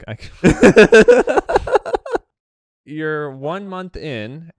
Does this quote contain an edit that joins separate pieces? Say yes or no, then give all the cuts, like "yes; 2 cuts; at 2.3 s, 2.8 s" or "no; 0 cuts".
yes; 1 cut; at 2.2 s